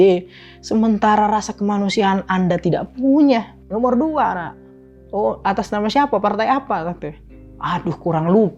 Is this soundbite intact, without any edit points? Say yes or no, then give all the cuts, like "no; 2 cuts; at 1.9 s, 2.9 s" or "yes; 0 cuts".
no; 1 cut; at 3.6 s